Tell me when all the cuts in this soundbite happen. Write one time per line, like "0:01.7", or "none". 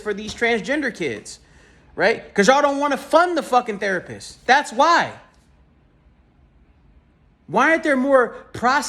none